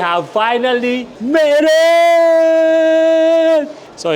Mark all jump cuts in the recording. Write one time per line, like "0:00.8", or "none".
0:01.1